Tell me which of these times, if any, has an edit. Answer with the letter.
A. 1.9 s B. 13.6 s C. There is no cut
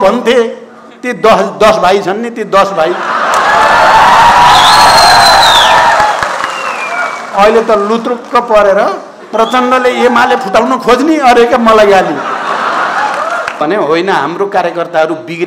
B